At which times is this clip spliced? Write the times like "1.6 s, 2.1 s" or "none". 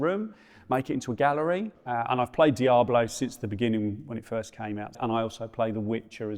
1.7 s, 5.0 s